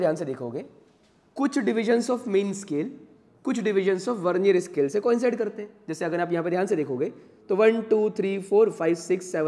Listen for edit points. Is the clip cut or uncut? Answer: uncut